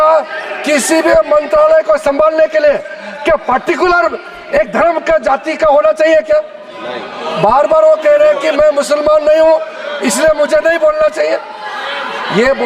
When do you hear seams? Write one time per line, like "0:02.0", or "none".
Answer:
none